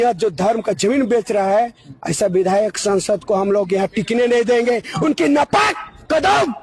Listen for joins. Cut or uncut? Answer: uncut